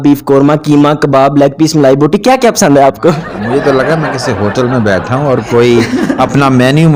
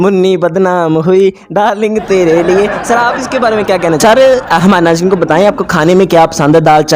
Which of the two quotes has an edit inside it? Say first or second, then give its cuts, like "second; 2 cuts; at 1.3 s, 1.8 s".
second; 1 cut; at 4.0 s